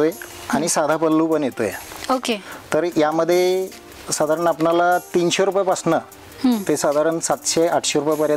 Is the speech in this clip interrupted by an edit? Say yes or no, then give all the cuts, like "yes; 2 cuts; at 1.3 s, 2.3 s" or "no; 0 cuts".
no; 0 cuts